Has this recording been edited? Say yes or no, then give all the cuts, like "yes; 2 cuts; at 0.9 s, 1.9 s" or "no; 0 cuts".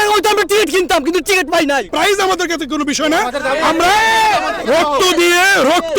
yes; 1 cut; at 1.9 s